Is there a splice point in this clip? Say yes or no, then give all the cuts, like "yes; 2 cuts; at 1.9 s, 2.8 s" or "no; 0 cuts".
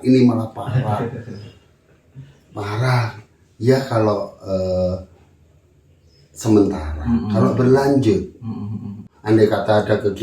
yes; 1 cut; at 9.1 s